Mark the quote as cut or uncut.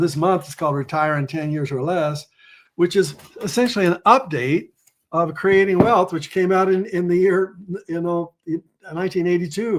uncut